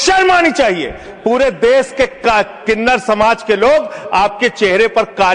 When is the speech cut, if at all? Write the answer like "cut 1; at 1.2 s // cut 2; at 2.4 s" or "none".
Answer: none